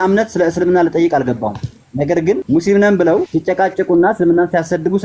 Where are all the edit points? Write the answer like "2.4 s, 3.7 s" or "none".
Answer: 2.4 s, 3.3 s